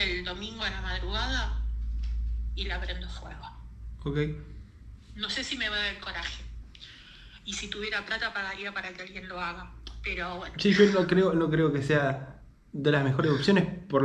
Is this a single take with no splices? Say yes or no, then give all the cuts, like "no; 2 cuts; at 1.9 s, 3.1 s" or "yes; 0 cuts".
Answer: yes; 0 cuts